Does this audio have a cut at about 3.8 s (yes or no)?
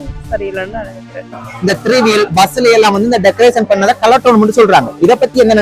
no